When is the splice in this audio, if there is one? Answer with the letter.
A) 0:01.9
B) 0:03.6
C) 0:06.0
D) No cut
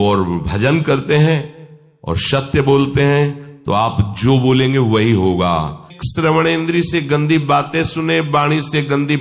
C